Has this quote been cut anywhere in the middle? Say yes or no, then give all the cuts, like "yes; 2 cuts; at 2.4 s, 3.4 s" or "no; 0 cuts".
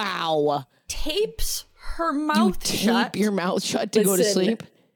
no; 0 cuts